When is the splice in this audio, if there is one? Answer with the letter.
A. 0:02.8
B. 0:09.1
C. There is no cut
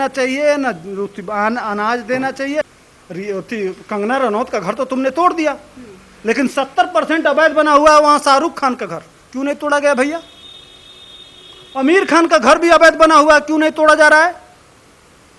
A